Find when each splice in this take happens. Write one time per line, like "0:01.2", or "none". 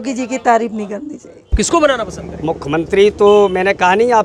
0:01.5